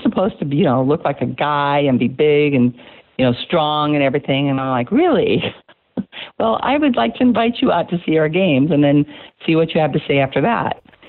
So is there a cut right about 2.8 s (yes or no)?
no